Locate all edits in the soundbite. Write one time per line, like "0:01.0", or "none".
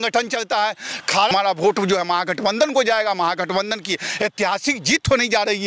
0:01.3